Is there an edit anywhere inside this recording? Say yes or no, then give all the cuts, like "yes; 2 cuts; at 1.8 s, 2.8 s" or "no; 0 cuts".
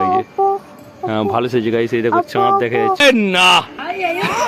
yes; 1 cut; at 3.0 s